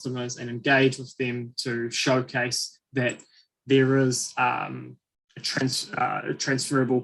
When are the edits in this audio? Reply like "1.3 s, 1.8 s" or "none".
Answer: none